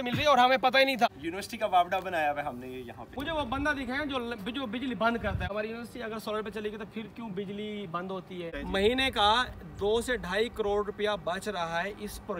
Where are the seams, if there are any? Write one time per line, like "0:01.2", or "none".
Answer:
0:01.1
0:03.1
0:05.5
0:08.6